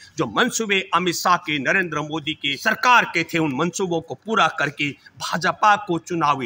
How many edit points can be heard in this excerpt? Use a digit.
1